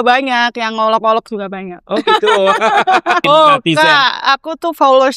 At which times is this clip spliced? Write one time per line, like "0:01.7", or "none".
0:03.2